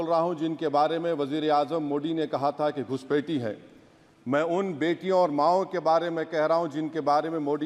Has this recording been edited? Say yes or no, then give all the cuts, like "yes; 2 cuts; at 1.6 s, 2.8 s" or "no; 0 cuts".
no; 0 cuts